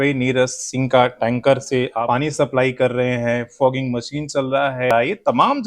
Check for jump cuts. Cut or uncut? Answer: cut